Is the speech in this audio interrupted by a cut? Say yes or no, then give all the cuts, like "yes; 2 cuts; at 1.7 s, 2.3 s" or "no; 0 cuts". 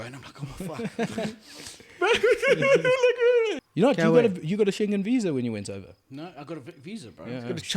yes; 1 cut; at 3.6 s